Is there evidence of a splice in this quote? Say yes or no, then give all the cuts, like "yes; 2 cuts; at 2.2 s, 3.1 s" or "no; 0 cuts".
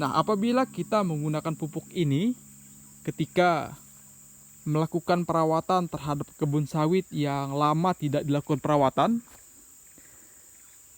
no; 0 cuts